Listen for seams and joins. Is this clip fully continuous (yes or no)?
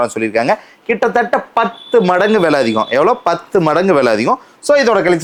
yes